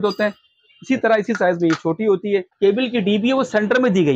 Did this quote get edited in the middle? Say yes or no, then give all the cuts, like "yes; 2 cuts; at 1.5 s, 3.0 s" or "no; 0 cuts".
yes; 1 cut; at 2.5 s